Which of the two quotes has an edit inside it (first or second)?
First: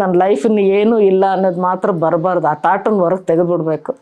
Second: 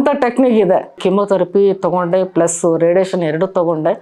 second